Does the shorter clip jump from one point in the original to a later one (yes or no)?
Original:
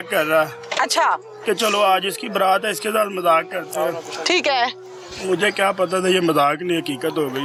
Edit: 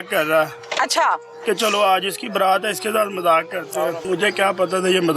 yes